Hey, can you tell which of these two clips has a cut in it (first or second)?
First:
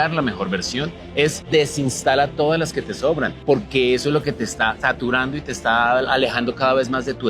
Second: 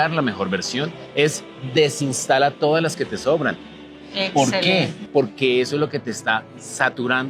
first